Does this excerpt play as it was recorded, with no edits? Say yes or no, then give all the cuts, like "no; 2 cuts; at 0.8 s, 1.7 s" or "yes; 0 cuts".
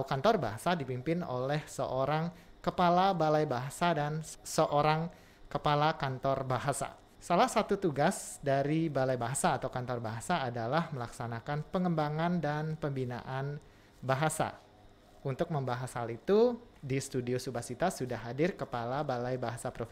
no; 2 cuts; at 4.2 s, 7.1 s